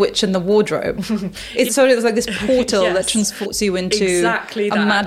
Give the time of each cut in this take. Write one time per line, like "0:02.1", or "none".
0:01.7
0:03.5